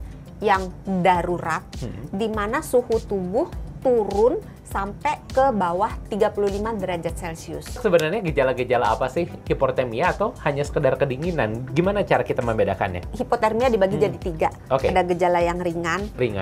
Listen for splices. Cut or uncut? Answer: cut